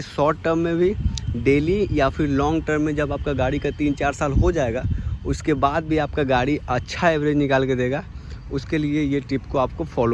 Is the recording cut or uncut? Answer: uncut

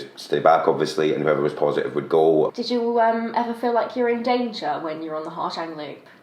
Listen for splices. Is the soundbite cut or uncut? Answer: cut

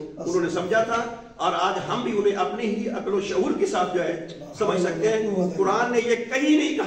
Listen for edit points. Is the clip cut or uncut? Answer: uncut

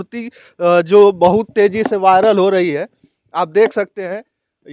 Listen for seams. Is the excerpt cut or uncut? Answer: uncut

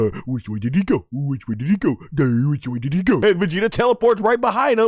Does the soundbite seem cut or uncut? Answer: cut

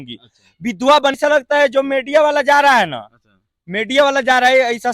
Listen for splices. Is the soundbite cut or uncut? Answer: cut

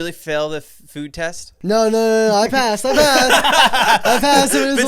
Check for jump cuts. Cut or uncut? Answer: cut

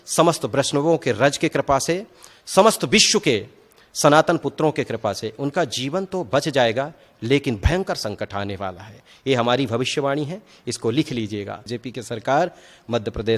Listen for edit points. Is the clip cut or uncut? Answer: cut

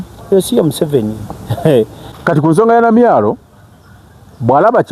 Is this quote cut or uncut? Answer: cut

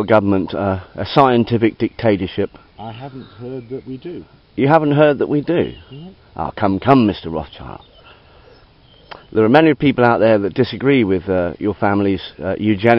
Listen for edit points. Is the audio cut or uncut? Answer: uncut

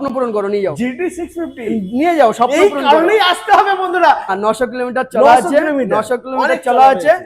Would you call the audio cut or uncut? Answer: cut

